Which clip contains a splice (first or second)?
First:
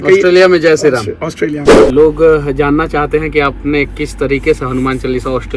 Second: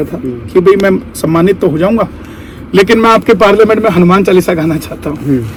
first